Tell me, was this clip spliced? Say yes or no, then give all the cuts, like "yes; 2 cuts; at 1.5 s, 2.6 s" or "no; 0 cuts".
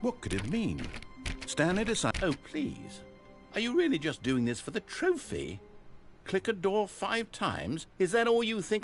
yes; 1 cut; at 2.1 s